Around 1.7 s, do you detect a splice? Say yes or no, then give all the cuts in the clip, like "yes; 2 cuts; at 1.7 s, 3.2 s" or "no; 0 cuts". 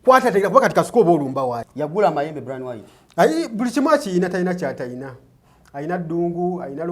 yes; 1 cut; at 1.7 s